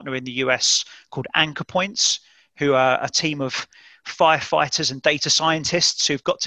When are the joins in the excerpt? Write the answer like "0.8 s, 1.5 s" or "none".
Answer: none